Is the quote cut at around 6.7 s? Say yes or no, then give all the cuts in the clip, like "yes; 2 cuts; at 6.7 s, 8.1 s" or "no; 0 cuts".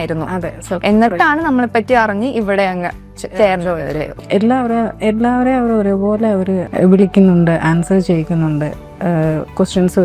yes; 2 cuts; at 4.1 s, 6.7 s